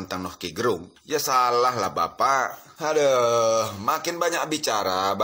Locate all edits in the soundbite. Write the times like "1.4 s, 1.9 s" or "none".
0.9 s, 2.6 s

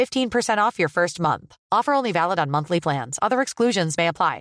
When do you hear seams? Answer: none

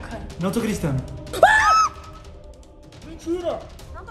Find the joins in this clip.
1.2 s

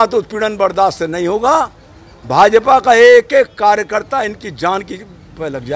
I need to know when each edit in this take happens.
none

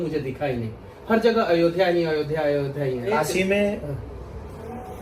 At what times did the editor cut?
3.2 s

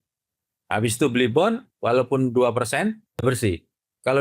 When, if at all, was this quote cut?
1.7 s, 3.1 s

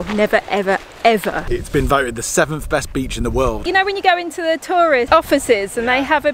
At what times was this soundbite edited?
1.4 s, 3.6 s, 5.1 s

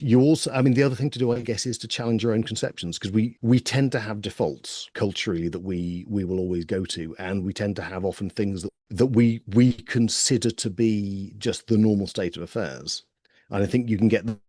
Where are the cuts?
3.4 s, 4.9 s, 8.8 s

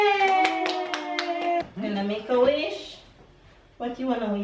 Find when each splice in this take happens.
1.6 s

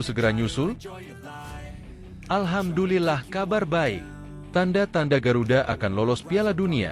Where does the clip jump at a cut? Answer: 0.9 s, 2.2 s

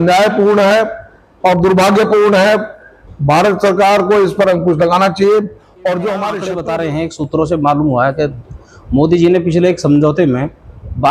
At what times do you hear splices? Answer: 6.4 s

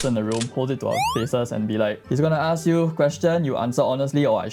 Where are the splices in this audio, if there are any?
none

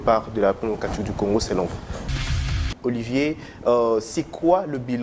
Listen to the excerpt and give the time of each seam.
2.4 s

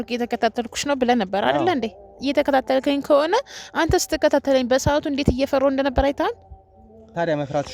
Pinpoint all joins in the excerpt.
none

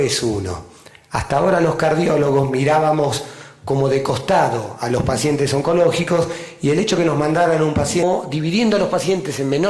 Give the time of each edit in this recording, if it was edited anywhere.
none

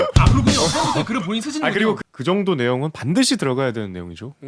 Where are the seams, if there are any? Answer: 2.0 s

